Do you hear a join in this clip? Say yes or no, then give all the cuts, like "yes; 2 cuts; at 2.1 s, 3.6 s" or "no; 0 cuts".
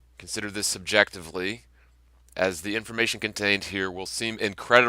yes; 1 cut; at 2.2 s